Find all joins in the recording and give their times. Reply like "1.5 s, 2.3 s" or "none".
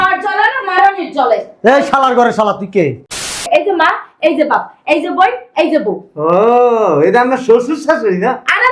3.4 s